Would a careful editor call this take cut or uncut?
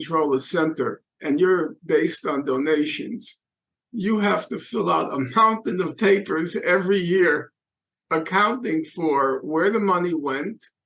cut